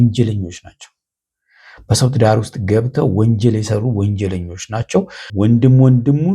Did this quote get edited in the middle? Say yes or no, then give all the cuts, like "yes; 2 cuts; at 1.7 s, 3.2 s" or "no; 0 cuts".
yes; 1 cut; at 5.2 s